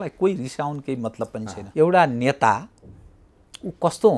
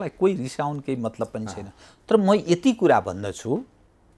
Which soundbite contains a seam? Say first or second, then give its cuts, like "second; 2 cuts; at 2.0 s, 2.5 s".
first; 1 cut; at 1.6 s